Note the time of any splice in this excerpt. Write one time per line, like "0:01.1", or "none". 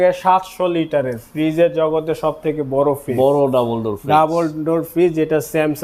none